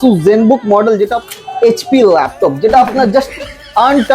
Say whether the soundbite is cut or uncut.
cut